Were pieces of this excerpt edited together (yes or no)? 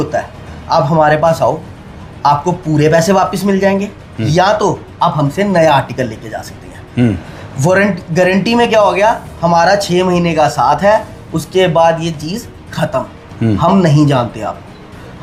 no